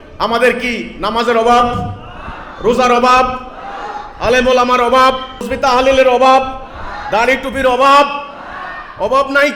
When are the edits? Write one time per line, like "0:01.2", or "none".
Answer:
none